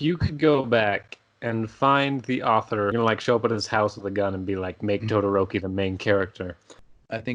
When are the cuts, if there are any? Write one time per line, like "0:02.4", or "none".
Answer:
0:02.9